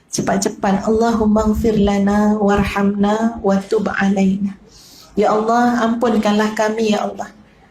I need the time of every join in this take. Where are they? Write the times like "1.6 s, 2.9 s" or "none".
none